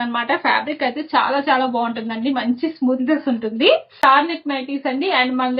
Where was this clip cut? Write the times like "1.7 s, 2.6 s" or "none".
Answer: 4.0 s